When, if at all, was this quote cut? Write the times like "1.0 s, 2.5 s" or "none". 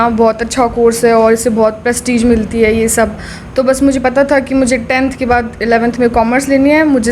none